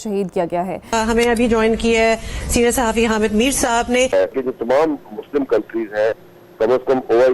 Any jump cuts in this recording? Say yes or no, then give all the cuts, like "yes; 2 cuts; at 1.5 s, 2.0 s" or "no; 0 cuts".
yes; 2 cuts; at 0.9 s, 4.1 s